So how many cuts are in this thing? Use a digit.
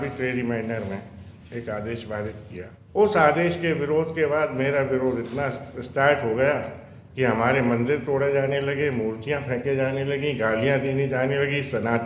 1